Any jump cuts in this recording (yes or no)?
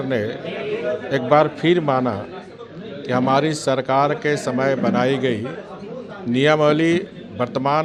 no